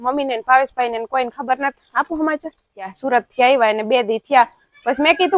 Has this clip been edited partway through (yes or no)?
yes